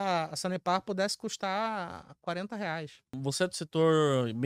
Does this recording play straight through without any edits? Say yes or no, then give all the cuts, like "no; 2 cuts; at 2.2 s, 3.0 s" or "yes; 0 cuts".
yes; 0 cuts